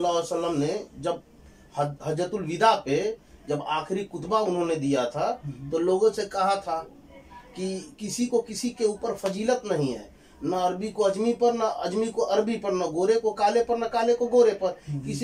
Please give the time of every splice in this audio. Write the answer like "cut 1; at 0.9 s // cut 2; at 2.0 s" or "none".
none

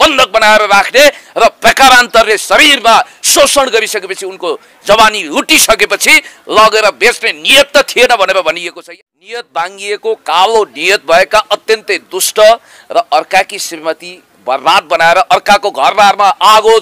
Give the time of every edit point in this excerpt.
cut 1; at 8.8 s

